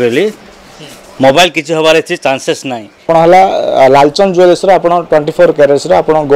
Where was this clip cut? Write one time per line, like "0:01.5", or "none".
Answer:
0:03.1